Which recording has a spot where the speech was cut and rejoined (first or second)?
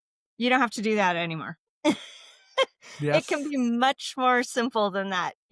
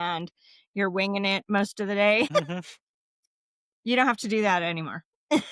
second